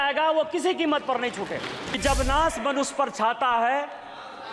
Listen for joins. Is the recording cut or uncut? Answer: cut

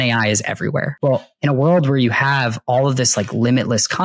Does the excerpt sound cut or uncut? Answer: cut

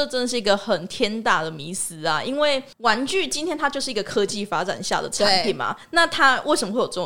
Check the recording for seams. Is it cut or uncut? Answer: cut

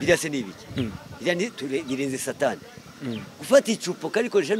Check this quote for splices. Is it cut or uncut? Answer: uncut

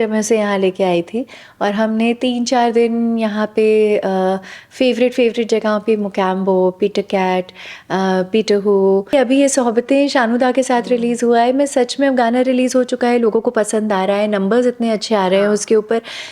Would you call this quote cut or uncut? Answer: cut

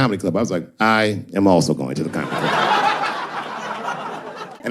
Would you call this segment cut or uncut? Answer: uncut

